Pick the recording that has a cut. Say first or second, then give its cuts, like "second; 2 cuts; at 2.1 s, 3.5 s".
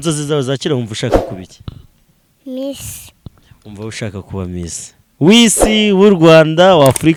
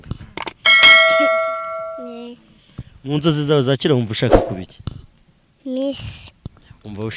second; 2 cuts; at 0.8 s, 2.0 s